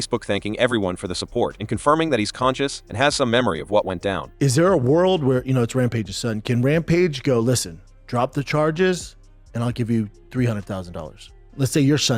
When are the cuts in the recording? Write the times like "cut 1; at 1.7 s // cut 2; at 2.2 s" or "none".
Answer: cut 1; at 4.3 s